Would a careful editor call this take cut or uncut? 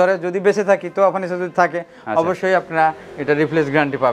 uncut